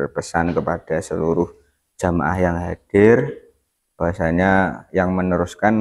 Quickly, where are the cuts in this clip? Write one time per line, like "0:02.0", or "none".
none